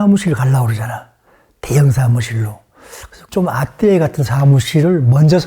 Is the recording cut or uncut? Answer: cut